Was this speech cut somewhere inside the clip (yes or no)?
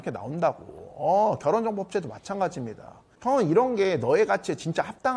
no